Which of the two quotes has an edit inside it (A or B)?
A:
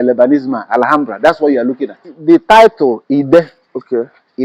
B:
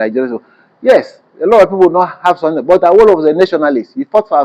A